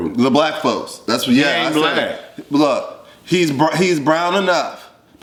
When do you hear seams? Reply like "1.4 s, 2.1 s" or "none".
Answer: none